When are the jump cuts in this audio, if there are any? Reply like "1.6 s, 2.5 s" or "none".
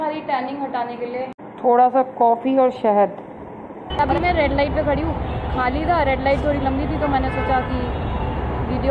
1.4 s, 4.0 s

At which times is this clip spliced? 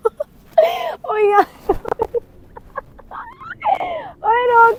none

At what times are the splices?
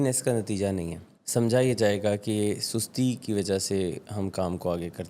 1.0 s

